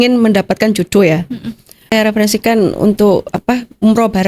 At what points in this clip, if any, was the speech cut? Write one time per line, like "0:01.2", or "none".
0:01.9